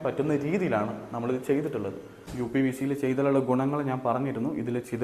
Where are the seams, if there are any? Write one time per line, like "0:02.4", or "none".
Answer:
0:02.3